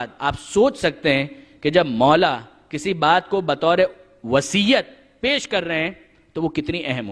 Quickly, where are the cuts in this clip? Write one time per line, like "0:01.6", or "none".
0:03.6